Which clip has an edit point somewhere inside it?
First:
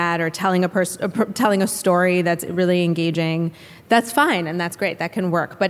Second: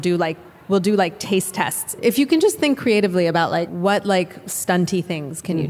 second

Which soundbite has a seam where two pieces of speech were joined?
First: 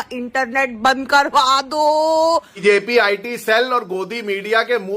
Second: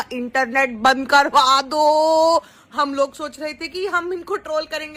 first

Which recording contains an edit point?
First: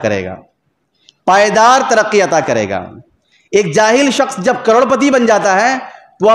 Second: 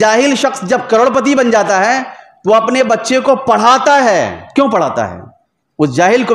second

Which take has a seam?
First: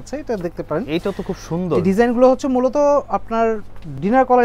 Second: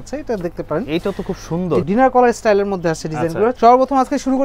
second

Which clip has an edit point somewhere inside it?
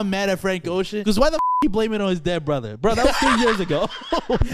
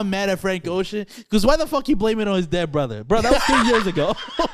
first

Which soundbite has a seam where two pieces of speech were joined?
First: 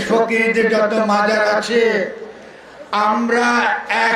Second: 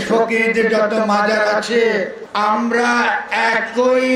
second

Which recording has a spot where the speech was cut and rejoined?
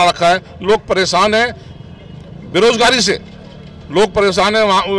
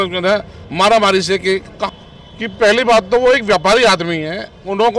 second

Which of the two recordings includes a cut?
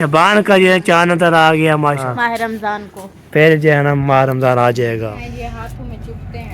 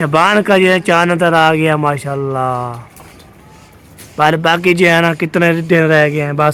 first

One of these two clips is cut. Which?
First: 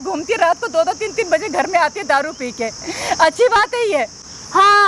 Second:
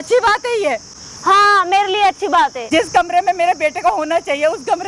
second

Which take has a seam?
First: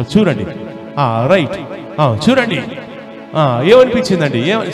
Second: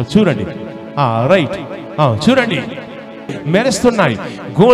second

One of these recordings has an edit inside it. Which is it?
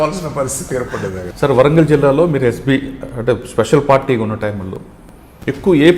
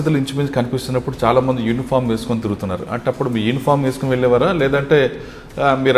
first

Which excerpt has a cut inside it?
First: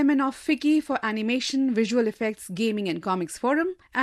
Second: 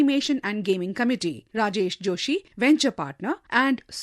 second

